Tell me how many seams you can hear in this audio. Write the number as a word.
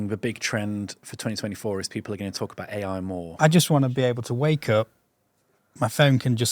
two